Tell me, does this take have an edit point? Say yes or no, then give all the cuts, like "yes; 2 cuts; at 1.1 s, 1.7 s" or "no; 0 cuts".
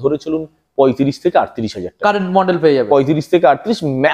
no; 0 cuts